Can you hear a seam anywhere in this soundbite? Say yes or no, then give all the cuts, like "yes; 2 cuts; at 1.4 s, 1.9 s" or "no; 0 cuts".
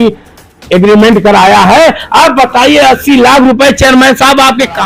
no; 0 cuts